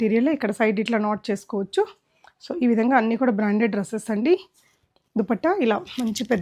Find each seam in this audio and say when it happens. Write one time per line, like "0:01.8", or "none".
none